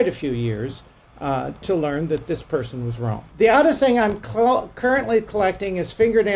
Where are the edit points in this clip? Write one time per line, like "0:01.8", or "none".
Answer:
0:03.2